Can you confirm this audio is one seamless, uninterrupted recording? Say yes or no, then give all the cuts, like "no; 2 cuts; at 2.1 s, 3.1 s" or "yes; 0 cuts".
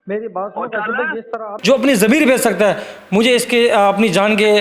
no; 1 cut; at 1.4 s